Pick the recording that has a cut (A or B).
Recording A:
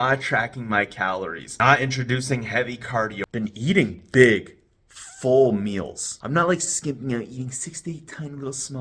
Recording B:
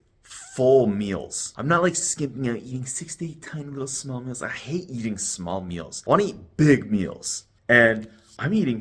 A